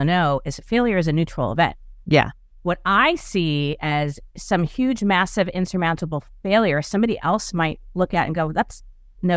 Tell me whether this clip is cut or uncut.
cut